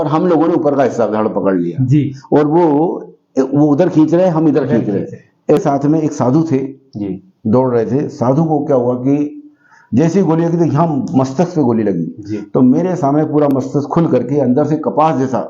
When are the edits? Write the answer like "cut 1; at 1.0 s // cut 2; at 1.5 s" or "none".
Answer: cut 1; at 5.6 s